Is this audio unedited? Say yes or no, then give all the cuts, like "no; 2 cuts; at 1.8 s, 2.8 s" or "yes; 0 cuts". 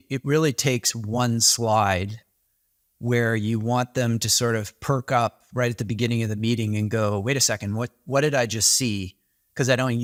yes; 0 cuts